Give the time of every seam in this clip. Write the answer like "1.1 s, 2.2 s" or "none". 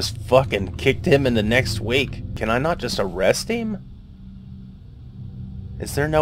2.3 s